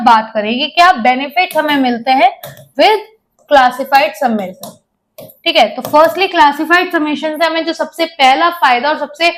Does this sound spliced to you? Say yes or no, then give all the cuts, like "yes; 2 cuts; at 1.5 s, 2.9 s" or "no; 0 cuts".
no; 0 cuts